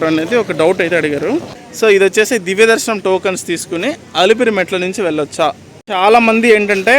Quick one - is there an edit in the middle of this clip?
yes; 2 cuts; at 1.9 s, 5.7 s

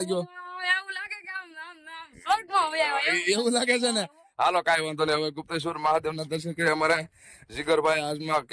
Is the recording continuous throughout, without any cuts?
yes; 0 cuts

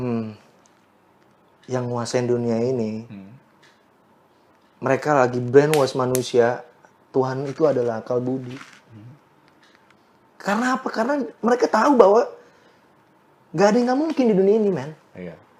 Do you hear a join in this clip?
no; 0 cuts

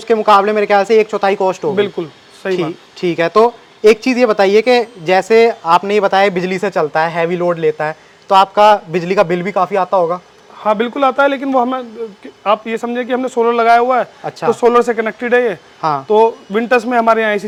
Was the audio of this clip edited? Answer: no; 0 cuts

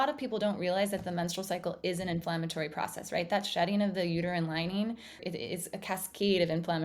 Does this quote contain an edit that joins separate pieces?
yes; 1 cut; at 5.2 s

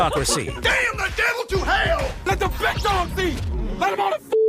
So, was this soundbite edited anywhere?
no; 0 cuts

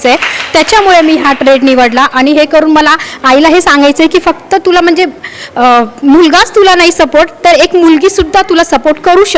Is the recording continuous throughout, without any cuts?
yes; 0 cuts

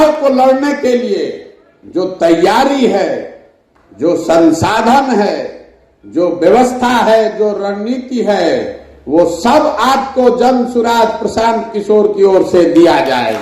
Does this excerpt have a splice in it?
no; 0 cuts

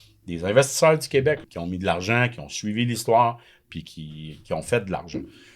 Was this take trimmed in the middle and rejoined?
yes; 1 cut; at 1.6 s

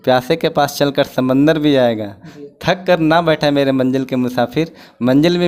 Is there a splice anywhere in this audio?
no; 0 cuts

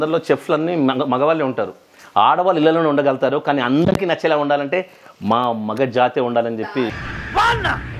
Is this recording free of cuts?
no; 1 cut; at 7.0 s

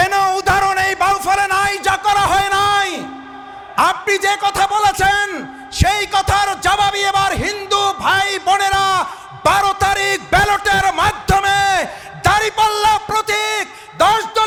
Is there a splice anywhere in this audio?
no; 0 cuts

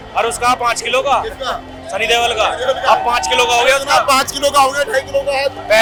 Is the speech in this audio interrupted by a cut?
no; 0 cuts

